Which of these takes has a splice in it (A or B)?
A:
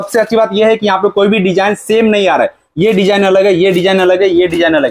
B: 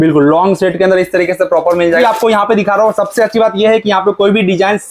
B